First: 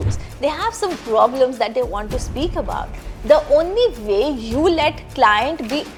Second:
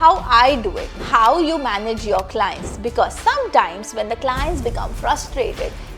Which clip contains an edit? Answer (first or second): second